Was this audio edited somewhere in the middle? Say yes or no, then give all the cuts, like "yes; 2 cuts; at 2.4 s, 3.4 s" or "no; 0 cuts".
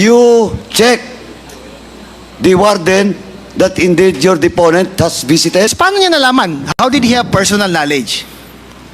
yes; 1 cut; at 5.7 s